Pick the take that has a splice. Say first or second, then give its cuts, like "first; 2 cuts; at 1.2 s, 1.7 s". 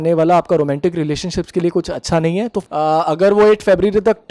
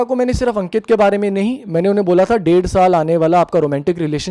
first; 1 cut; at 2.6 s